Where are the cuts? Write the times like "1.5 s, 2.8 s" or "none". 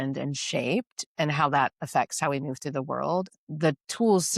3.3 s